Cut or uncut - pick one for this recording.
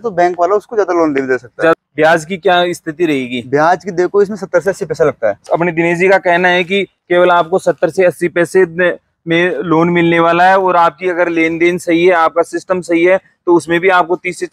cut